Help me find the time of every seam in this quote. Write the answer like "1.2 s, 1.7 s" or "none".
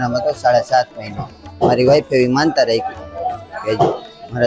1.5 s